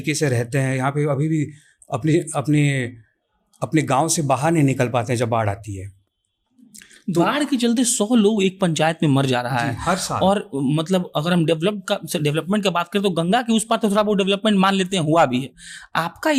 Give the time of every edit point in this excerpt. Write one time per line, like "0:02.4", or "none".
none